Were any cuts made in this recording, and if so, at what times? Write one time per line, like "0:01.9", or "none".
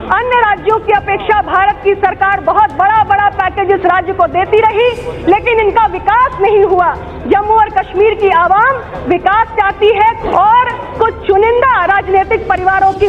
0:10.2